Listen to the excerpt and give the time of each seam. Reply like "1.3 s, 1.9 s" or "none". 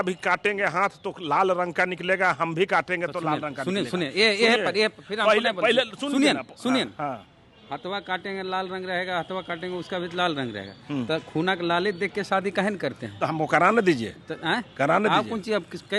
none